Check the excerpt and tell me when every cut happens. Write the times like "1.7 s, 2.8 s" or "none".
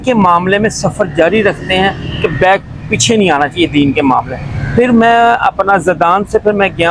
none